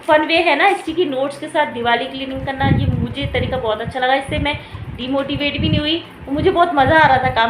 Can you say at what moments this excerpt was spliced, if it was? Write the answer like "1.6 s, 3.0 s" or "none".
none